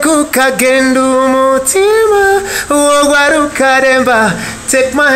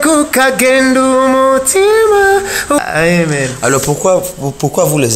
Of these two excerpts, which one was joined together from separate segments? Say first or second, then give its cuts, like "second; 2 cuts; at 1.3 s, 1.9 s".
second; 1 cut; at 2.8 s